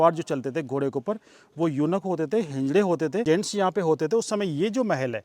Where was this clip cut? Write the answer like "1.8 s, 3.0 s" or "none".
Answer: 3.2 s